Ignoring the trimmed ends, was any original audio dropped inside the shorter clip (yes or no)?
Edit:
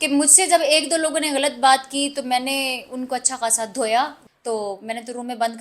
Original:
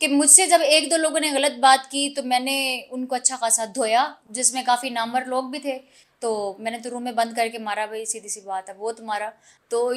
yes